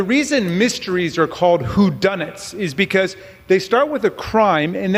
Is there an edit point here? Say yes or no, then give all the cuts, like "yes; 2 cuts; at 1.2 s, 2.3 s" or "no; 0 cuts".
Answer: no; 0 cuts